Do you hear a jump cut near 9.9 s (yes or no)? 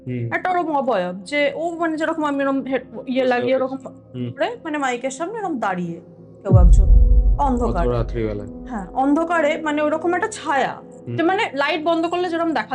no